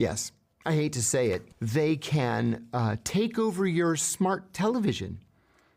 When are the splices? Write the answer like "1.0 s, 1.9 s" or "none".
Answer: 1.5 s